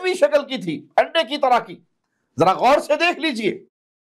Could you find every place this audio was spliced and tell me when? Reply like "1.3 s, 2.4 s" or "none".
none